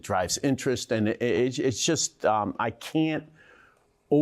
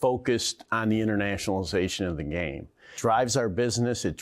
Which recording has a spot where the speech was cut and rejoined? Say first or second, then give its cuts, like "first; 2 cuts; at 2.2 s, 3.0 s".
second; 1 cut; at 2.9 s